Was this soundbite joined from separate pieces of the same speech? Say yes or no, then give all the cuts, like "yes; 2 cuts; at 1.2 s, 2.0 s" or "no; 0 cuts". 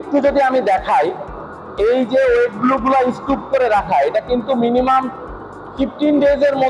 no; 0 cuts